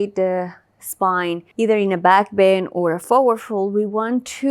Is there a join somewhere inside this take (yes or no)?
yes